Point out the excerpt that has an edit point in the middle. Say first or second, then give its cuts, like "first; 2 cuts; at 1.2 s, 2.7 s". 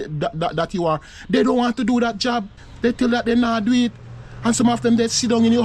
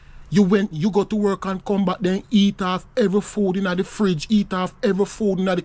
first; 1 cut; at 2.6 s